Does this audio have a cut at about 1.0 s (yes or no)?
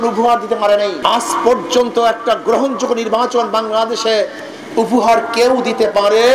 yes